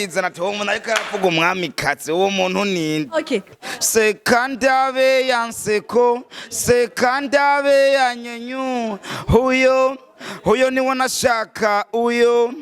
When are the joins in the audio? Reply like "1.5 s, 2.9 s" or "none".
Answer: 3.5 s

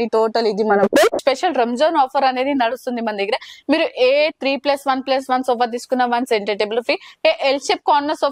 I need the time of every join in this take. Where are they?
1.2 s

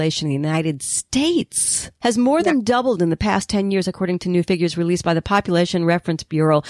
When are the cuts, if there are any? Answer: 1.9 s

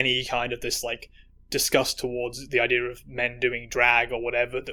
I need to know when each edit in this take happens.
none

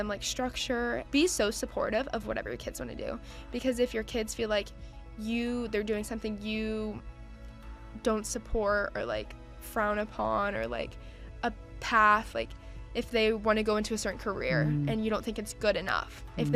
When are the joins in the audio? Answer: 1.0 s

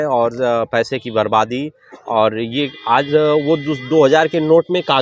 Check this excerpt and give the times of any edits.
none

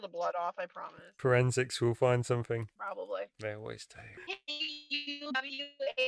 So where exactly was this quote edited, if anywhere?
4.2 s

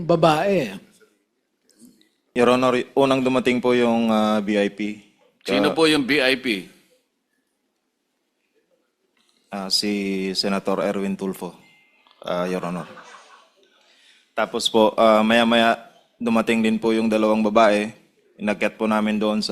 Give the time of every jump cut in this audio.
2.3 s

